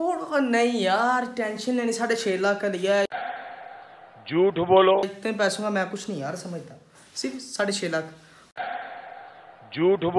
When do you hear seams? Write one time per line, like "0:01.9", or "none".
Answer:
none